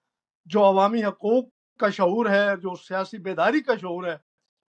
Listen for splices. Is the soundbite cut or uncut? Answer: uncut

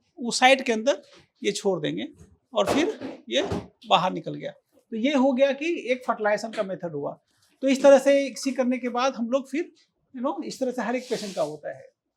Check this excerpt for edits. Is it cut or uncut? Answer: uncut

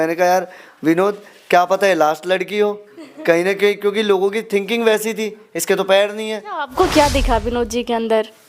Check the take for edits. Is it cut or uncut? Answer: cut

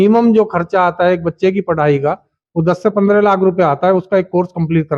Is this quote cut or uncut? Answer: uncut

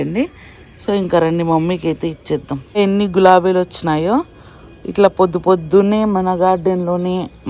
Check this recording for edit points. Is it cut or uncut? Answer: cut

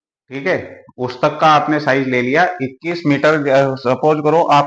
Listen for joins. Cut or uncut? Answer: uncut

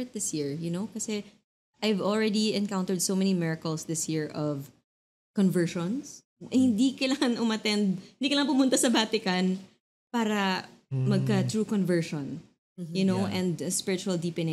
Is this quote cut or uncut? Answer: uncut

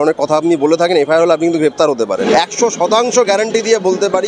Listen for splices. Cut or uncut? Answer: cut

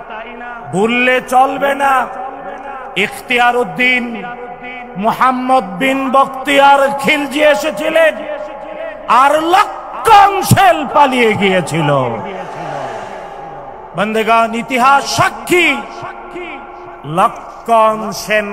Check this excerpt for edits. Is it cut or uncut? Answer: uncut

